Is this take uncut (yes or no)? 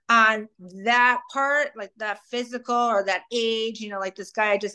yes